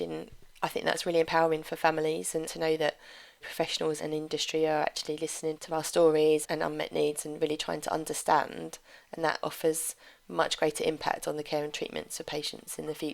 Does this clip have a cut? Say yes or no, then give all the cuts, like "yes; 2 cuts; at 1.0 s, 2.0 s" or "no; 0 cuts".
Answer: yes; 4 cuts; at 2.5 s, 4.0 s, 6.4 s, 9.4 s